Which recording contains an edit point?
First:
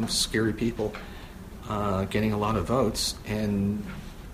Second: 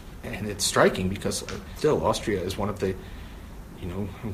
second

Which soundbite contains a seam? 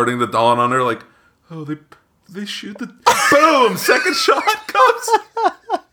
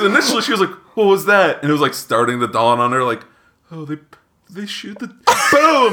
first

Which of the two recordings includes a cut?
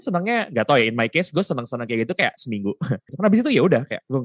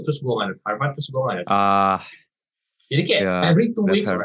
first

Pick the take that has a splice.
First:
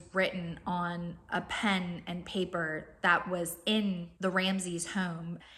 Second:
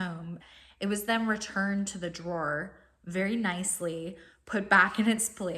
first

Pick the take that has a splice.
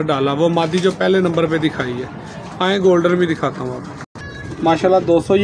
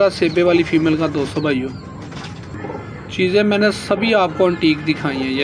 second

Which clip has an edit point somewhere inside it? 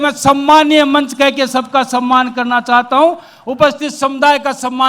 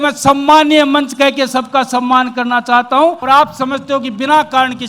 second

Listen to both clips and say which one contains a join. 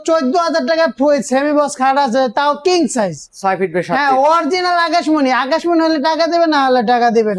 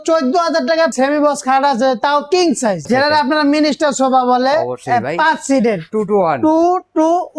second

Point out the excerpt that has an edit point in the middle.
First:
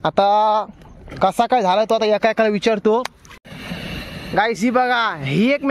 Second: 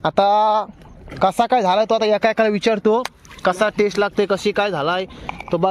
first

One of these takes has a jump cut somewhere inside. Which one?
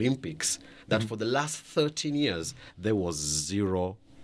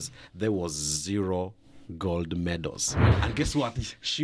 second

